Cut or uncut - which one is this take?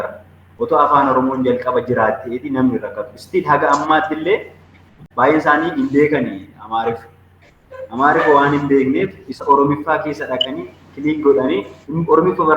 cut